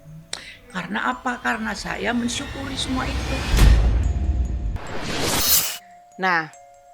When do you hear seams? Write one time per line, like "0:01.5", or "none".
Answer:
0:03.5
0:05.6